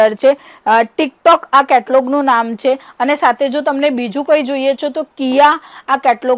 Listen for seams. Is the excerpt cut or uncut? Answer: uncut